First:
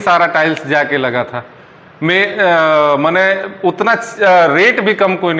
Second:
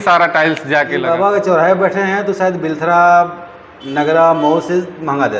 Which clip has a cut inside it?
second; 1 cut; at 1.0 s

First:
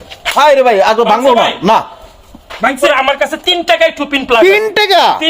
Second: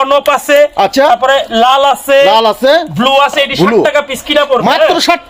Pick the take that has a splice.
first; 1 cut; at 2.8 s

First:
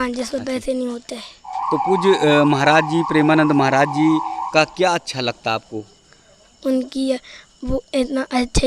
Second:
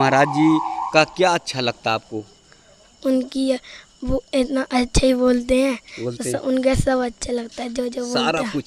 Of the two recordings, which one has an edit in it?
first; 1 cut; at 1.6 s

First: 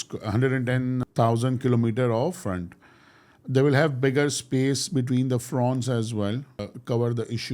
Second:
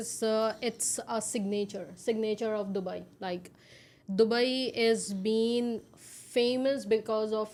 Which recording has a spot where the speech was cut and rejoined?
first; 3 cuts; at 1.0 s, 2.5 s, 6.7 s

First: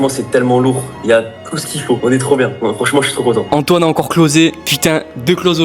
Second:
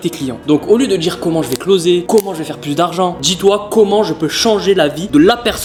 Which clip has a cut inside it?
first; 2 cuts; at 3.5 s, 4.7 s

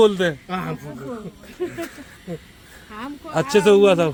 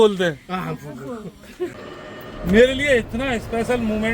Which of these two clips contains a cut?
second; 1 cut; at 1.7 s

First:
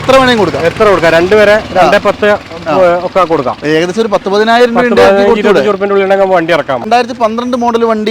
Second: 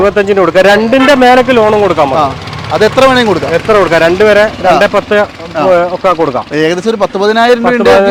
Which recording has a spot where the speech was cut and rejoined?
first; 1 cut; at 6.9 s

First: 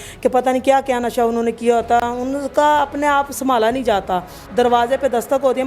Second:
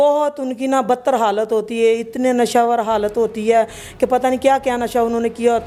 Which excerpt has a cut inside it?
first; 1 cut; at 4.5 s

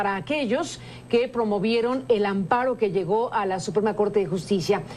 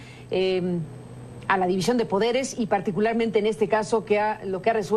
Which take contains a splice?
first; 1 cut; at 2.8 s

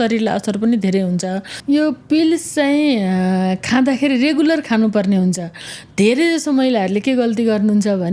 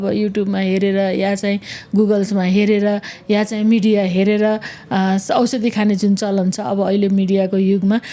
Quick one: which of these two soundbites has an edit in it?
first; 1 cut; at 1.5 s

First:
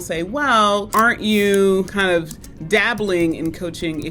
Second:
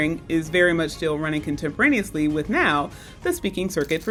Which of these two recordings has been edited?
first; 2 cuts; at 0.9 s, 1.9 s

